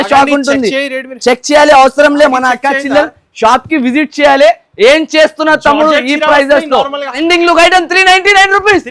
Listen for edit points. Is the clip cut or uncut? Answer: cut